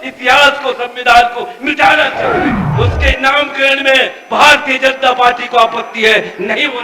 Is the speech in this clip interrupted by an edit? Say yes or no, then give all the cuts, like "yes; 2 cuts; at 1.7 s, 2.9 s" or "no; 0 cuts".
yes; 1 cut; at 2.6 s